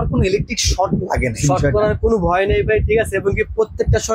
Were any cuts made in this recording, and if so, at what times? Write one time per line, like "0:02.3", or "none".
0:01.4